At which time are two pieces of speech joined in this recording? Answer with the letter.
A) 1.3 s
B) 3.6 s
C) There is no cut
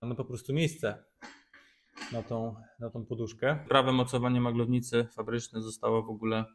B